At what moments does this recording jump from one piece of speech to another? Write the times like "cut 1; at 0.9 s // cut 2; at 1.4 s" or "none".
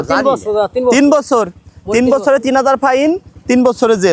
none

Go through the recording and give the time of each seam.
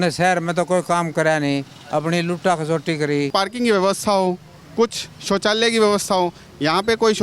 cut 1; at 3.3 s

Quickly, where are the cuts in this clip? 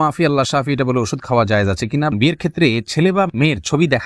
cut 1; at 2.1 s

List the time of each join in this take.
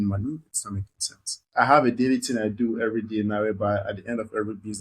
cut 1; at 1.4 s

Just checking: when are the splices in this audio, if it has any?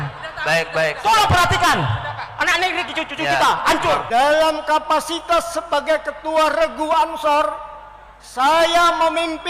cut 1; at 4.0 s

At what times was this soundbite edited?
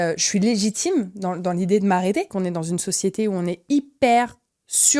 cut 1; at 2.3 s

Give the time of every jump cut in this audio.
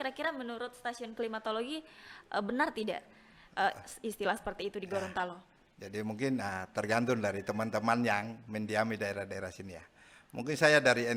none

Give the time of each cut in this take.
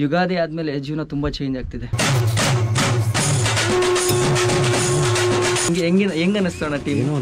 cut 1; at 1.9 s // cut 2; at 5.7 s

